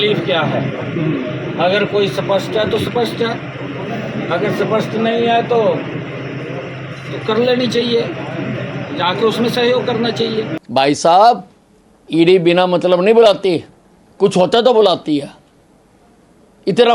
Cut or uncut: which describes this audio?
cut